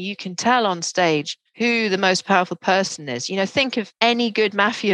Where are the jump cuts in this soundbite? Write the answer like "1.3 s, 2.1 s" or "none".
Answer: 1.4 s, 3.9 s